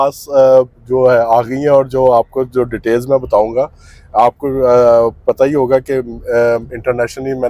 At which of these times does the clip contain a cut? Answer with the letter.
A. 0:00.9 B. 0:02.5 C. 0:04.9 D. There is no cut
D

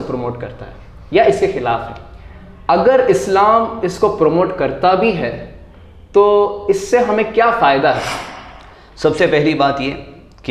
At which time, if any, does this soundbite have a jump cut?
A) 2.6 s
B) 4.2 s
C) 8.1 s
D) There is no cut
C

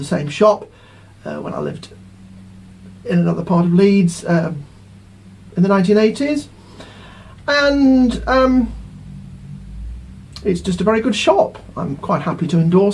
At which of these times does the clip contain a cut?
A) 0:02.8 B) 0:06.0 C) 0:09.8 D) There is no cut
C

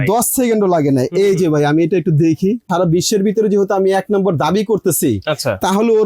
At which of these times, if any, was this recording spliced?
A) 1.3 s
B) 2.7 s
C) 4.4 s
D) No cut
B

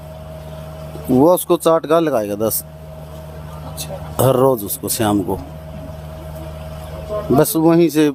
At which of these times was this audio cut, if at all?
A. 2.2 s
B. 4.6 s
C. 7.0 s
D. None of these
D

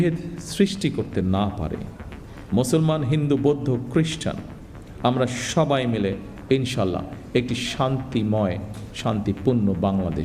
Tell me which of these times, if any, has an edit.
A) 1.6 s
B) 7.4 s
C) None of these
C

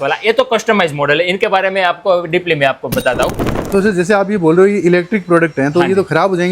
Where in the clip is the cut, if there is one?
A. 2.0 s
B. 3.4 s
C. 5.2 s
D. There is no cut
B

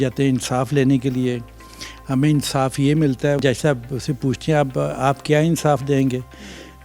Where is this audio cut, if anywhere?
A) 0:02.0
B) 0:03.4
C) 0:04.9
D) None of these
B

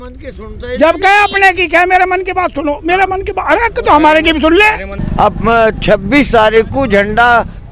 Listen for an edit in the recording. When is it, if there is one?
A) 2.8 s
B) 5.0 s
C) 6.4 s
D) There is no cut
B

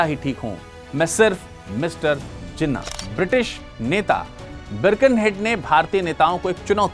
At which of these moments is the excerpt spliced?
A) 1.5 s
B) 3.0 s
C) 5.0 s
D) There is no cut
B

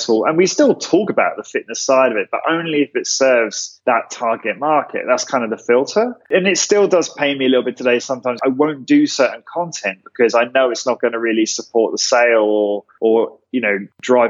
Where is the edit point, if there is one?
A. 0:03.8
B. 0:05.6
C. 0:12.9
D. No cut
D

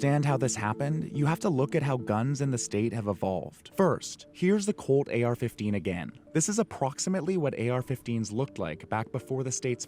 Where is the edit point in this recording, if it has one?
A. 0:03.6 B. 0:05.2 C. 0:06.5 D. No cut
A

